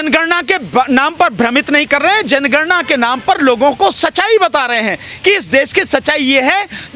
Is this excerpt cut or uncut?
uncut